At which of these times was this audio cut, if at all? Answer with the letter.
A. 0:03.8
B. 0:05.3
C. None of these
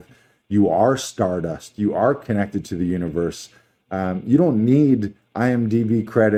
C